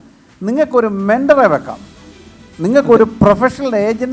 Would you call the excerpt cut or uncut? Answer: uncut